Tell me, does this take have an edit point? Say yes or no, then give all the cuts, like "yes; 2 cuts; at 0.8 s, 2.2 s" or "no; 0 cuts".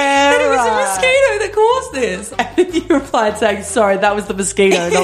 yes; 1 cut; at 2.2 s